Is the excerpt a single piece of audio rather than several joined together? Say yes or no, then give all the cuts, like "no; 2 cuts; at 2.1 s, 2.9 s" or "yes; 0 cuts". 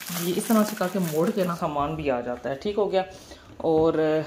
no; 1 cut; at 1.6 s